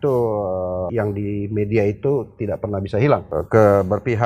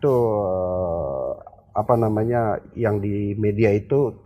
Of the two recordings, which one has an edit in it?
first; 2 cuts; at 0.9 s, 3.3 s

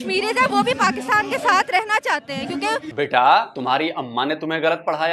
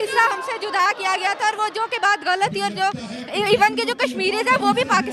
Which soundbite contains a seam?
first; 2 cuts; at 2.9 s, 3.5 s

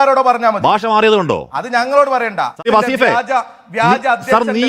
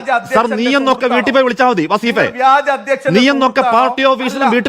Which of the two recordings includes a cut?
first; 1 cut; at 2.7 s

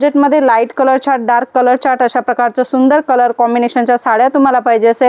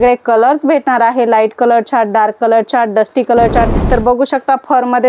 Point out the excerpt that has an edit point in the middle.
second; 1 cut; at 3.8 s

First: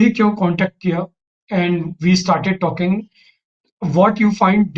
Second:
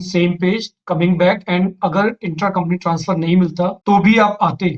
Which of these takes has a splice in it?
second; 1 cut; at 3.8 s

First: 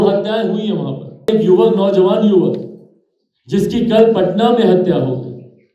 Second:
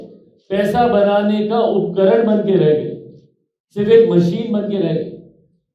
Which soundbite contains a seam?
first; 1 cut; at 1.3 s

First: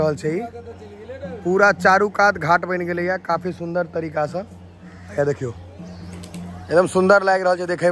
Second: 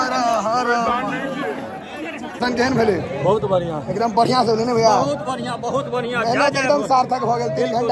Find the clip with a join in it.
second; 1 cut; at 2.3 s

